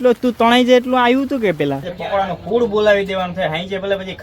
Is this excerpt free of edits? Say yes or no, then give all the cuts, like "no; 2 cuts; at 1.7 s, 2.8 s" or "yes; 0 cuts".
no; 1 cut; at 1.9 s